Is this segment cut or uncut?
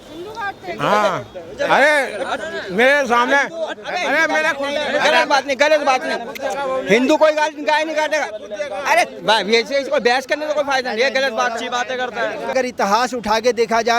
cut